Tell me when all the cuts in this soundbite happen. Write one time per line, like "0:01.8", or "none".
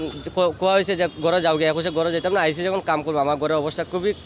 none